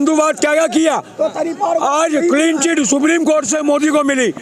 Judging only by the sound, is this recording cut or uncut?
uncut